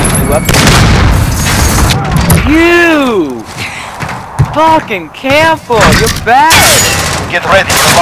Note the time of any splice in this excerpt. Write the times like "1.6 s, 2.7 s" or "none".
1.9 s